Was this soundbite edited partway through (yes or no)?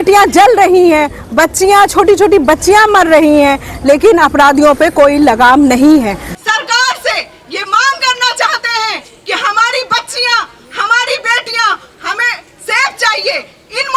yes